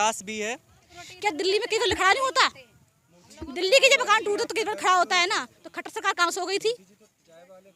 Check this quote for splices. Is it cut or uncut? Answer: cut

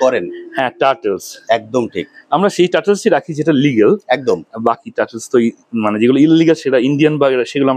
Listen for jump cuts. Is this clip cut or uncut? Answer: uncut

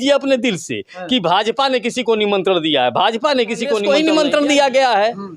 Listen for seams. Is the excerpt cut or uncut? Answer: cut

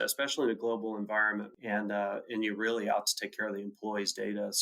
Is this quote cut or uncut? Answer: cut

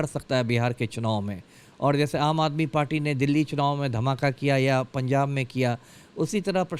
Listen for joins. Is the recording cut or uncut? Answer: uncut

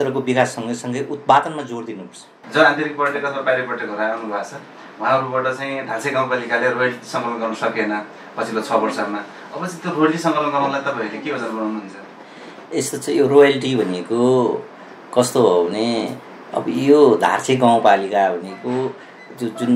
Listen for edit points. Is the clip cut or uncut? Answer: uncut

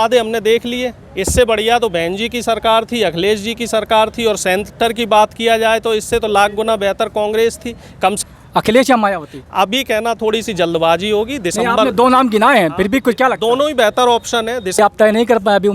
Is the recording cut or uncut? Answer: cut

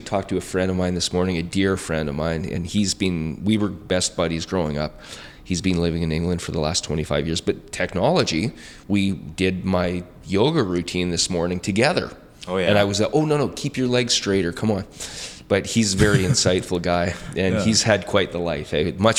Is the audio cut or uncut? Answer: uncut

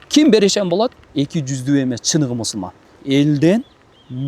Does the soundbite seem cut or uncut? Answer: cut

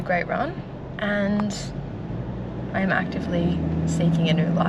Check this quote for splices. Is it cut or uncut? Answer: uncut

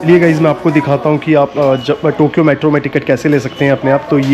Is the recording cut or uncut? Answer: uncut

